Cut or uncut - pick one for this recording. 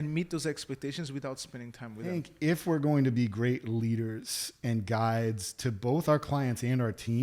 cut